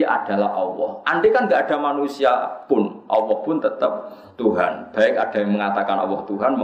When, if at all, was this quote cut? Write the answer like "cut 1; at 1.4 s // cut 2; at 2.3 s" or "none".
cut 1; at 5.6 s